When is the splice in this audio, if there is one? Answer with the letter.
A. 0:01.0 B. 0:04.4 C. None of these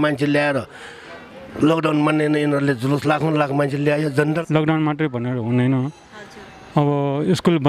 B